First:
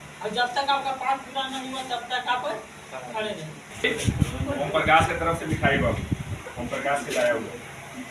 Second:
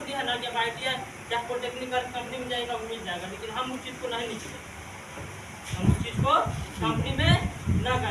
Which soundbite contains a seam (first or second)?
first